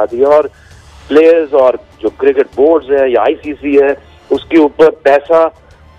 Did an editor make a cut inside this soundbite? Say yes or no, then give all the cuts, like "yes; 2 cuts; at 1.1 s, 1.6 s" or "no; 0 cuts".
no; 0 cuts